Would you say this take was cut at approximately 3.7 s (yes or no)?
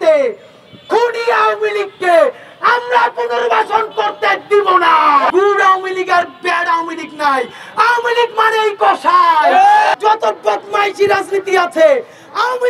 no